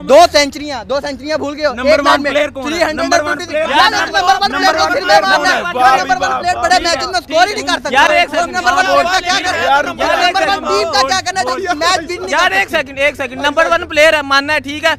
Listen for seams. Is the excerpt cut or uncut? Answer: uncut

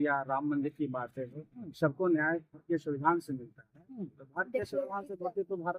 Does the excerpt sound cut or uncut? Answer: uncut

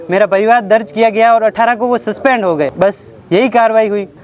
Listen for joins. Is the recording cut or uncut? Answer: uncut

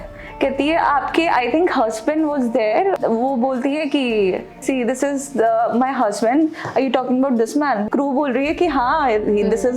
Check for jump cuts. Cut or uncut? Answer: cut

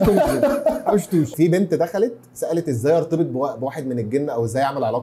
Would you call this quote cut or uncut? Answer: cut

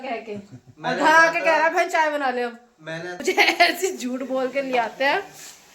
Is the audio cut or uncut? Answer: cut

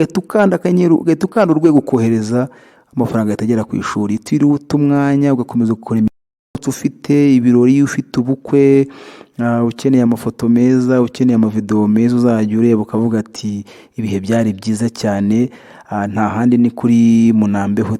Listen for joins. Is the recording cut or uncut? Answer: cut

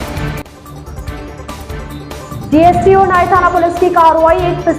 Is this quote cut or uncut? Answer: cut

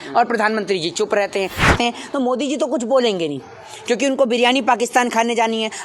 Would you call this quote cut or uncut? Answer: cut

